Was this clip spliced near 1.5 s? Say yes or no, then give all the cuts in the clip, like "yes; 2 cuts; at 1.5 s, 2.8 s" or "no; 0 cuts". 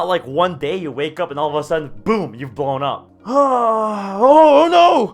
no; 1 cut; at 3.1 s